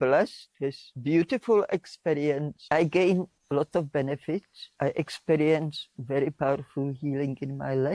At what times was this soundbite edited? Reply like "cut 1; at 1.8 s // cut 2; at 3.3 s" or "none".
cut 1; at 0.9 s // cut 2; at 2.5 s // cut 3; at 4.6 s